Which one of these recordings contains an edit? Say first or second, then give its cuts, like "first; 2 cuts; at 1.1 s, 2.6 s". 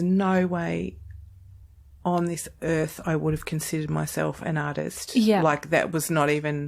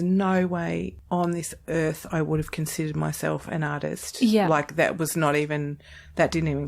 second; 1 cut; at 1.0 s